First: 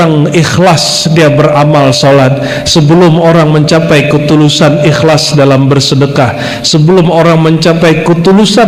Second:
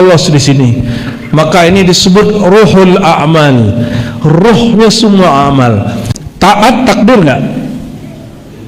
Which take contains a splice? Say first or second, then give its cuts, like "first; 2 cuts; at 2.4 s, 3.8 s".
second; 1 cut; at 6.0 s